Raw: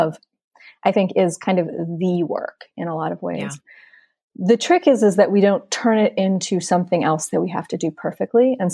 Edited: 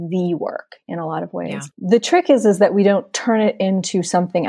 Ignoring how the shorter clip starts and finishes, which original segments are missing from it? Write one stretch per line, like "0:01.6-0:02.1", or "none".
0:03.6-0:04.3